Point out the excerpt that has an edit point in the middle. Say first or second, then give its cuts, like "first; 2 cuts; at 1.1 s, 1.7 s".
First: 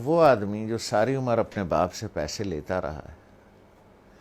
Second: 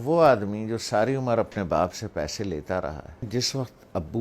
second; 1 cut; at 3.3 s